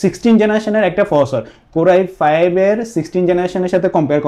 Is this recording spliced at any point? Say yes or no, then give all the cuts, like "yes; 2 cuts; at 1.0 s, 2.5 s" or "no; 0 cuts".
no; 0 cuts